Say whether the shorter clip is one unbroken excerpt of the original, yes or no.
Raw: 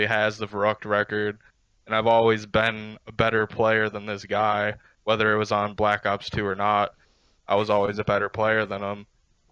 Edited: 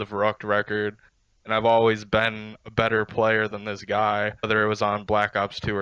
no